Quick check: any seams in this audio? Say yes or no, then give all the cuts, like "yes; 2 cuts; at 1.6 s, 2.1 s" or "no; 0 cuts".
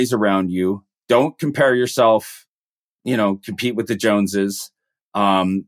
no; 0 cuts